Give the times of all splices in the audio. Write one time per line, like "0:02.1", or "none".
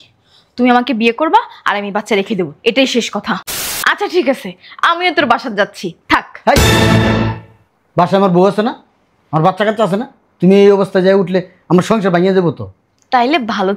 0:03.5